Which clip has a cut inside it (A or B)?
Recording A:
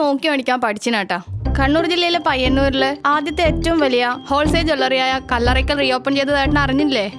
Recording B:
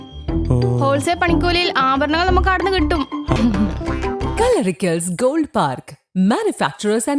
B